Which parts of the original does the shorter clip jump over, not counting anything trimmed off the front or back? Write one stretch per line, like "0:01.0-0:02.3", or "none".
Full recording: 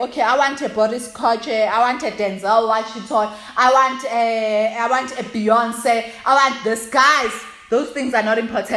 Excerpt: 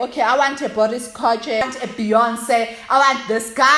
0:01.6-0:05.0